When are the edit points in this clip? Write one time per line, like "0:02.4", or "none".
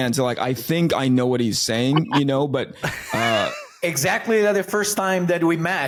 none